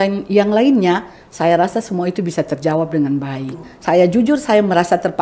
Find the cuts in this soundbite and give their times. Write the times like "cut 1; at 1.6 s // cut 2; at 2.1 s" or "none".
cut 1; at 3.7 s